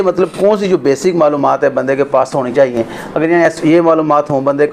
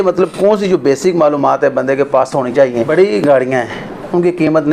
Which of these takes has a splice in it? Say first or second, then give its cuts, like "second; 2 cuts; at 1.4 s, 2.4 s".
second; 1 cut; at 2.8 s